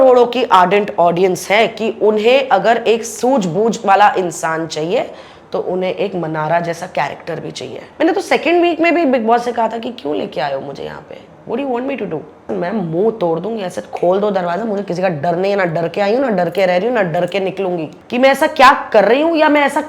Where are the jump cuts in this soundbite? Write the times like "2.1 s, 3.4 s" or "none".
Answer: 7.8 s, 12.5 s, 18.0 s